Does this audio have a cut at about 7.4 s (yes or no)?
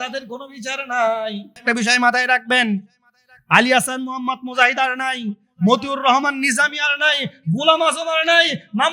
no